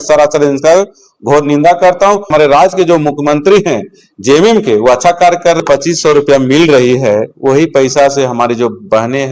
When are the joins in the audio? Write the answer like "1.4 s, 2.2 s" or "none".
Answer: 2.3 s, 5.6 s